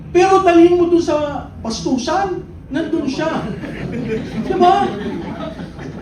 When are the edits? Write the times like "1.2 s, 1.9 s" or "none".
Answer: none

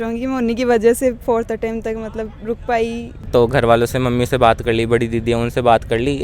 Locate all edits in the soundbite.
3.3 s

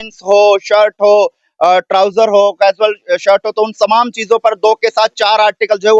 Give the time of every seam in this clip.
none

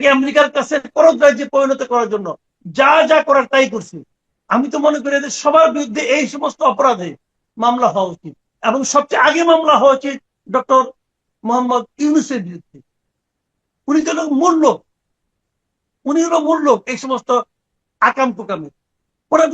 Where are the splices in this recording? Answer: 0.9 s

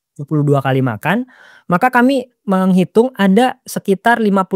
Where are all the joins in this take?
none

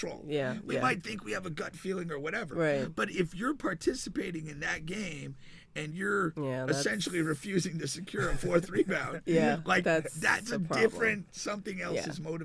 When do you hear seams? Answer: none

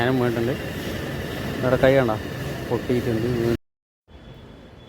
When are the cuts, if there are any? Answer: 3.6 s

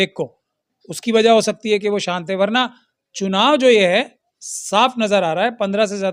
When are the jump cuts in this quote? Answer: none

